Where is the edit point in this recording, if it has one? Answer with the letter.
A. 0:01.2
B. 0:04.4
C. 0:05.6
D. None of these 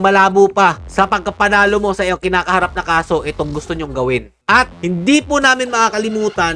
B